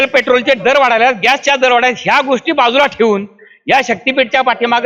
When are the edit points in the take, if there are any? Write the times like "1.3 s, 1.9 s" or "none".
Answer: none